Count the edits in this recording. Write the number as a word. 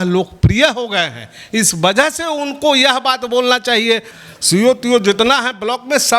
one